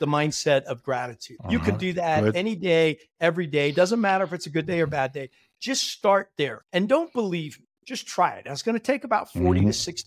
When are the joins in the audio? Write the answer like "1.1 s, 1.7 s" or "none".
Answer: 1.3 s, 6.6 s